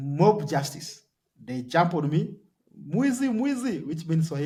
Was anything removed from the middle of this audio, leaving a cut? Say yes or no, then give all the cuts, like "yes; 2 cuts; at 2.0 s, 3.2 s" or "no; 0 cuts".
no; 0 cuts